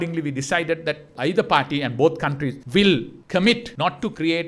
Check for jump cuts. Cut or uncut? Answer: cut